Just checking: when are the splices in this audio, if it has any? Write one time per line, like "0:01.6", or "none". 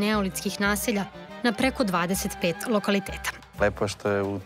0:03.4